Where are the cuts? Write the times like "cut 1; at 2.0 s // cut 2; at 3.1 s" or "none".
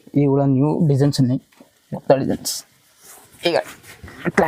none